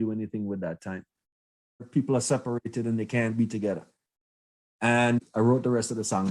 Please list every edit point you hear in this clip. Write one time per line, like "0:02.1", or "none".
0:01.8
0:05.3